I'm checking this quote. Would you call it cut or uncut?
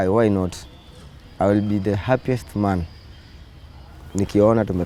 uncut